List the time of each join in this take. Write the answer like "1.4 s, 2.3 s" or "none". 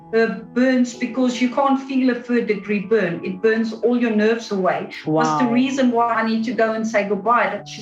6.2 s